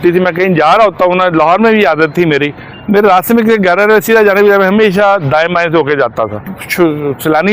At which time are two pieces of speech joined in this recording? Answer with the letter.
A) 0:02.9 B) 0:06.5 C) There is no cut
B